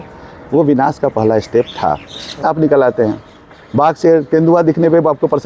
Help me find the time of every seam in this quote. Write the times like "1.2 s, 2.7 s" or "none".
2.4 s